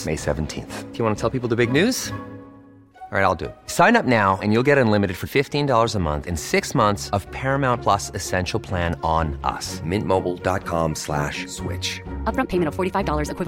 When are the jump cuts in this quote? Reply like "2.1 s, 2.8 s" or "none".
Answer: none